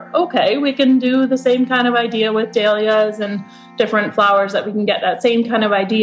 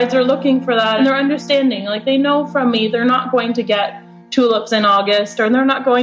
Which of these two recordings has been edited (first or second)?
second